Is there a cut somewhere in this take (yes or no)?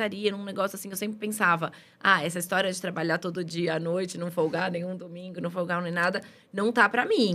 no